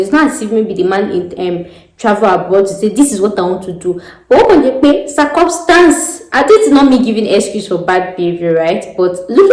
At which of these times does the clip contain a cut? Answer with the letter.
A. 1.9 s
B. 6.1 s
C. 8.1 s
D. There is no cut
D